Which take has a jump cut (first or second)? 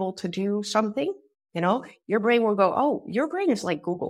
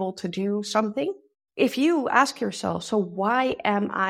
second